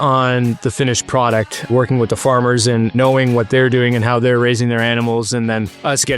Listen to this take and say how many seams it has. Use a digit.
2